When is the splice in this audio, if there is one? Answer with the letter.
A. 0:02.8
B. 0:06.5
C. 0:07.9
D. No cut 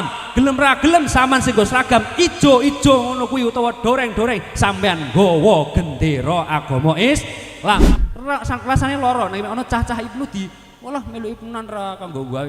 C